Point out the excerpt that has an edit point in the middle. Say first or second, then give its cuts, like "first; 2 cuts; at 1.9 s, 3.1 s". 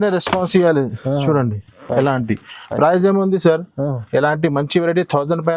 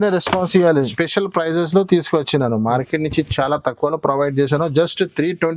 second; 1 cut; at 0.9 s